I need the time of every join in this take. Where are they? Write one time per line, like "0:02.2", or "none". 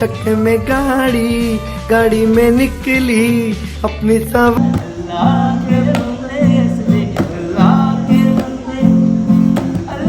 0:04.6